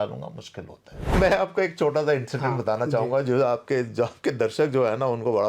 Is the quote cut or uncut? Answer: cut